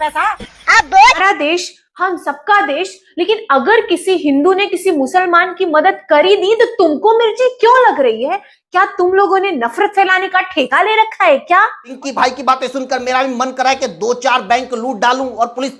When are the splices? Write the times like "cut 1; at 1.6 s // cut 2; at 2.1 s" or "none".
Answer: cut 1; at 1.2 s // cut 2; at 11.8 s

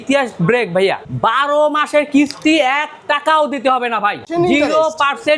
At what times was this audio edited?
cut 1; at 1.1 s // cut 2; at 4.2 s

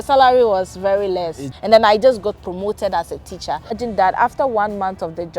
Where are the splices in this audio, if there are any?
cut 1; at 1.5 s // cut 2; at 3.8 s

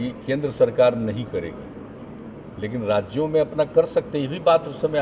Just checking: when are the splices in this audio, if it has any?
none

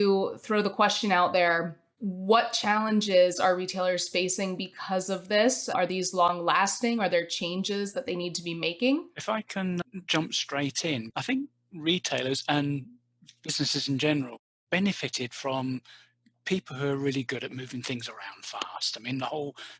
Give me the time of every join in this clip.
cut 1; at 5.7 s

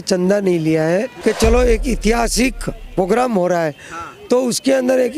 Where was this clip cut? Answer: cut 1; at 1.1 s

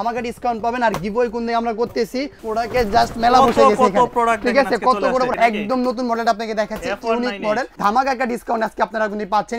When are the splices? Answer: cut 1; at 2.4 s // cut 2; at 5.3 s // cut 3; at 7.7 s

